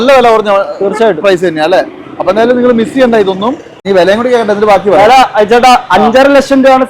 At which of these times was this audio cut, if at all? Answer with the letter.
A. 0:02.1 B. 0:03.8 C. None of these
B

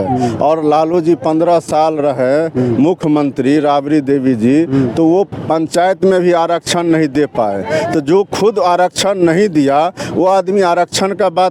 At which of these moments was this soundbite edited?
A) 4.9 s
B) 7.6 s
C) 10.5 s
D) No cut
D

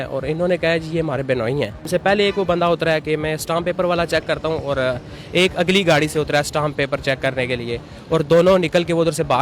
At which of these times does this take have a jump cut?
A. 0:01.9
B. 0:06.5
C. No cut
A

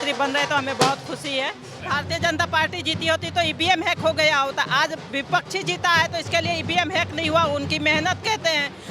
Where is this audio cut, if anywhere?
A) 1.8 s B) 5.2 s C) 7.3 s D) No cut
A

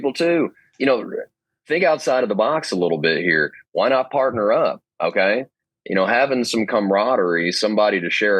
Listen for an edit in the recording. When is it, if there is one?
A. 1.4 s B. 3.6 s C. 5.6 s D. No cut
C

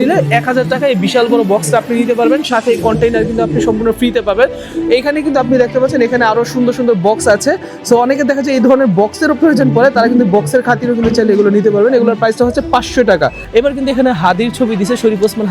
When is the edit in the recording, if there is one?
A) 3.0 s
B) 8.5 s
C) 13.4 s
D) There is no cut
C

